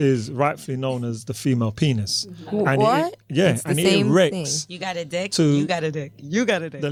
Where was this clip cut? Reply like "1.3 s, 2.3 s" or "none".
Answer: none

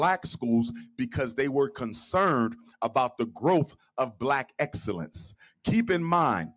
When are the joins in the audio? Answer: none

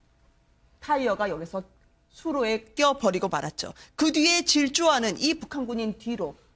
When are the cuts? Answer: 4.7 s

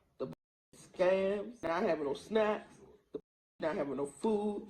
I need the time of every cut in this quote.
1.5 s

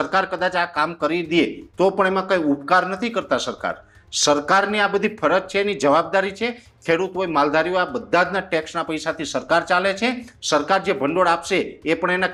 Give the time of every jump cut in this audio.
none

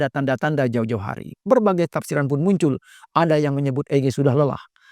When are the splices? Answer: 1.3 s

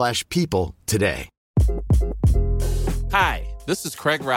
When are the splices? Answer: 1.3 s

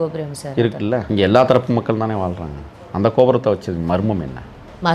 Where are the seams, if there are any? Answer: 1.0 s

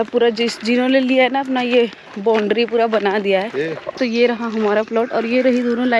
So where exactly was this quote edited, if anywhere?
3.9 s

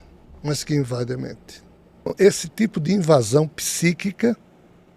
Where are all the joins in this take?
1.9 s

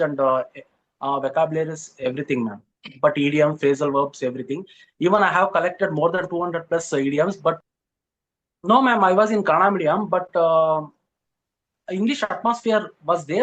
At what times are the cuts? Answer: 7.6 s

